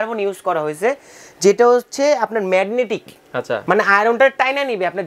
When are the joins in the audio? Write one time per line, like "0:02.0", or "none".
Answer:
0:03.6